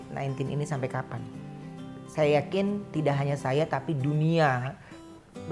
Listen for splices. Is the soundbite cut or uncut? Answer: uncut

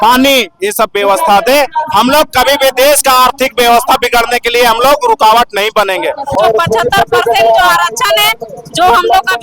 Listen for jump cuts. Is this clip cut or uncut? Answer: cut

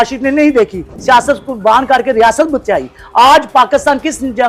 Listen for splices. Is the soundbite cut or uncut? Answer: uncut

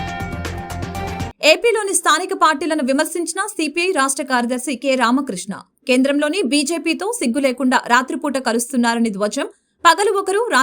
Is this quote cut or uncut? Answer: cut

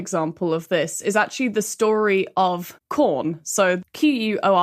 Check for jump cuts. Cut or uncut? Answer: cut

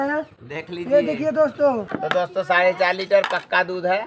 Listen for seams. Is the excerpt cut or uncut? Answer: cut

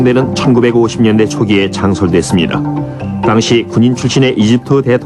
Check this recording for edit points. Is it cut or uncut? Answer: uncut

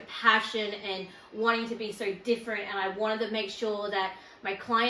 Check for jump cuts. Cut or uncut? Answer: uncut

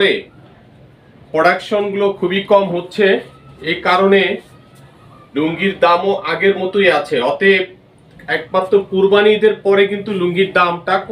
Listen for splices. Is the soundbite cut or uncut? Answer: uncut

